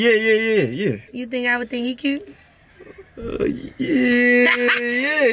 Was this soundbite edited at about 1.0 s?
yes; 1 cut; at 1.0 s

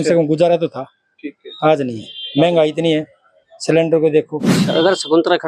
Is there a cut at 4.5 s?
yes; 1 cut; at 4.5 s

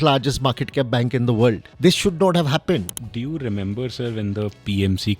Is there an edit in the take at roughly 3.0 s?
yes; 2 cuts; at 1.7 s, 3.0 s

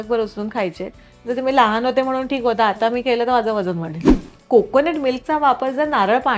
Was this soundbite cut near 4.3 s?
yes; 1 cut; at 4.3 s

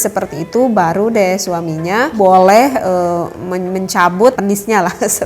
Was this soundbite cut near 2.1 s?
yes; 2 cuts; at 2.1 s, 4.4 s

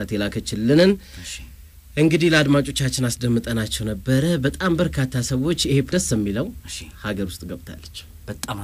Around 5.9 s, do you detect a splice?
yes; 1 cut; at 5.9 s

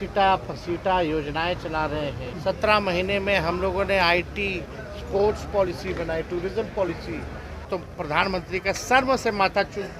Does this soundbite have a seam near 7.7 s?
yes; 2 cuts; at 2.3 s, 7.7 s

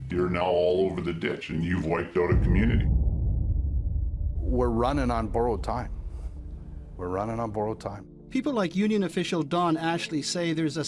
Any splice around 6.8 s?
yes; 1 cut; at 6.8 s

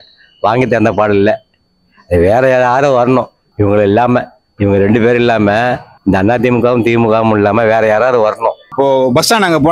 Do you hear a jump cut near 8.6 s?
yes; 1 cut; at 8.6 s

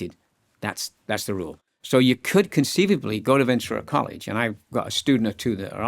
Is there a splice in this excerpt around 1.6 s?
yes; 1 cut; at 1.6 s

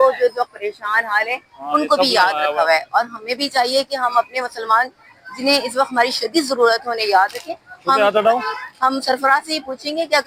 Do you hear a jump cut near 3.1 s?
no; 0 cuts

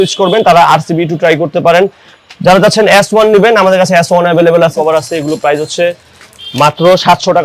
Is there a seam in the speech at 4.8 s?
yes; 1 cut; at 4.8 s

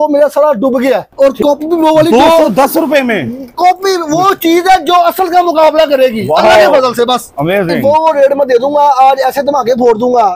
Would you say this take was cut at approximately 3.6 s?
no; 2 cuts; at 1.1 s, 7.7 s

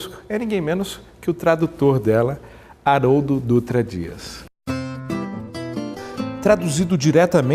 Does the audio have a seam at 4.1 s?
no; 1 cut; at 5.4 s

